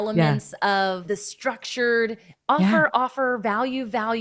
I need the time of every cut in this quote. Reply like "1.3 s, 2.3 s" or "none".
1.0 s